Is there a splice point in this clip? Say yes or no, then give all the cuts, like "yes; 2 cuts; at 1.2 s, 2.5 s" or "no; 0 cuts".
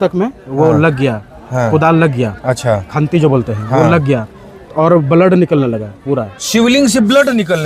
no; 0 cuts